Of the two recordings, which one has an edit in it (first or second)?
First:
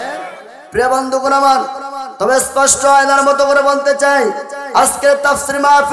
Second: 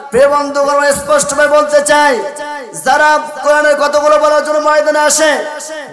second